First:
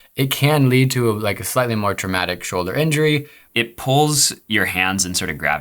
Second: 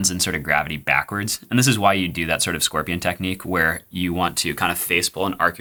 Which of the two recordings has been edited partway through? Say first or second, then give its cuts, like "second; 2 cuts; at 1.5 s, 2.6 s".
first; 1 cut; at 3.4 s